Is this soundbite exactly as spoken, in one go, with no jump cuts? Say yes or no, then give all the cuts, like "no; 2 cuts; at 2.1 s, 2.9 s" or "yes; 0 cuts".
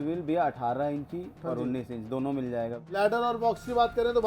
no; 1 cut; at 2.8 s